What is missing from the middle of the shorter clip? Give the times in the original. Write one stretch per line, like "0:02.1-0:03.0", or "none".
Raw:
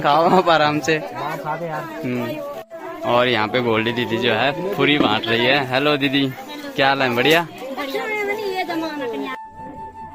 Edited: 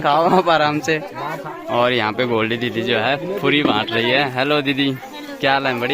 0:01.4-0:02.8